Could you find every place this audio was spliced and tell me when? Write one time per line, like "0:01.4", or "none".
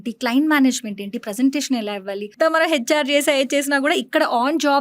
0:02.3